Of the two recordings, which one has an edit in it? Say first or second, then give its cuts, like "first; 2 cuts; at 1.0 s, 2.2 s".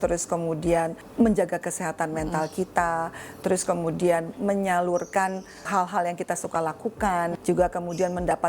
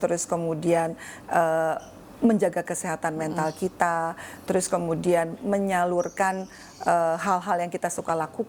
first; 3 cuts; at 1.0 s, 5.7 s, 7.4 s